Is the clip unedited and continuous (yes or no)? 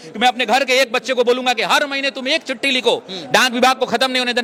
yes